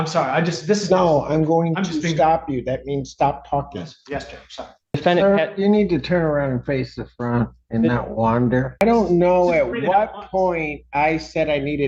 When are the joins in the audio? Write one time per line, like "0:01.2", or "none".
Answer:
0:04.9
0:08.8